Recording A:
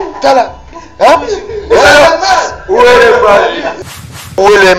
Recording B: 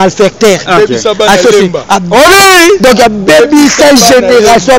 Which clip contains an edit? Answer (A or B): A